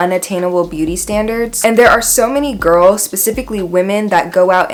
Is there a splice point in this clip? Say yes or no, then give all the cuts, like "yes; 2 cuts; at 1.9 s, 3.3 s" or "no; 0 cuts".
no; 0 cuts